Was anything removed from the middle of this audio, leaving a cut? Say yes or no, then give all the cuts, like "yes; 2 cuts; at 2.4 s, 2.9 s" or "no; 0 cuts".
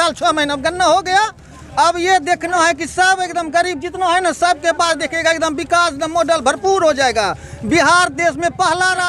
no; 0 cuts